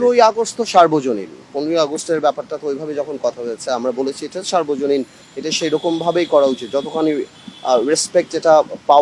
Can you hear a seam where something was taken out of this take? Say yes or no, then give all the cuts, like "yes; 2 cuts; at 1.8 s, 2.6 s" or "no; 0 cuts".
no; 0 cuts